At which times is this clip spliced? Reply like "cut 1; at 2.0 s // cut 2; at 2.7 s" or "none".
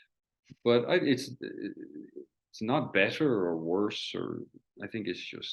cut 1; at 4.6 s